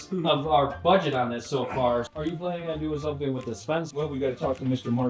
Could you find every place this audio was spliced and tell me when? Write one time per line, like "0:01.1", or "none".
0:02.1
0:03.9